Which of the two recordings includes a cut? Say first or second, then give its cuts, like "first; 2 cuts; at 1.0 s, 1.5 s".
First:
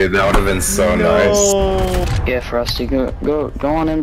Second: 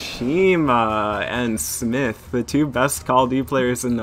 first; 1 cut; at 2.0 s